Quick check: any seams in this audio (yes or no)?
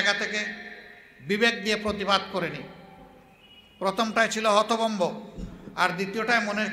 no